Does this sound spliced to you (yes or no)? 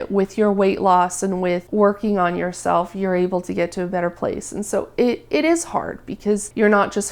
no